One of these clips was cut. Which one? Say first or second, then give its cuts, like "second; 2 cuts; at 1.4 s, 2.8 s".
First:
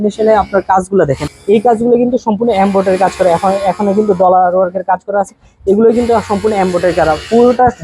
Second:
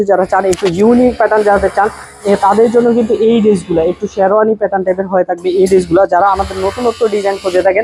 first; 1 cut; at 1.3 s